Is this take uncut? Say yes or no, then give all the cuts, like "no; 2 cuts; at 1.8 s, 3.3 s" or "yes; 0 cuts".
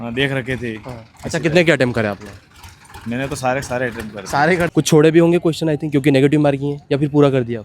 no; 1 cut; at 4.7 s